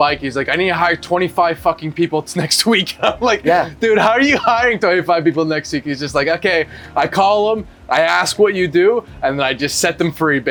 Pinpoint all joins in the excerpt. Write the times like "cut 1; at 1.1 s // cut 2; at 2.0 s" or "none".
none